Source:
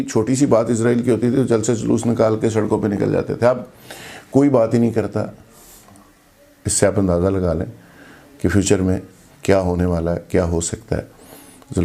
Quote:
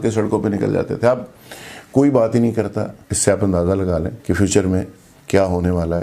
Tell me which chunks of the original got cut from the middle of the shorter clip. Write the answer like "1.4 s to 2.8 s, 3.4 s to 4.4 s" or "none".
5.4 s to 6.6 s, 7.7 s to 8.3 s